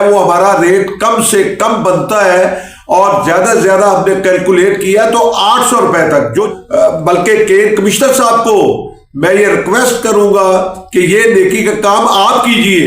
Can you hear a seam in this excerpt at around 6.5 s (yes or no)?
yes